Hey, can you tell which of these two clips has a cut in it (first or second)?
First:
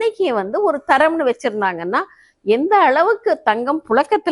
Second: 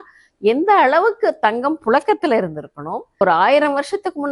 second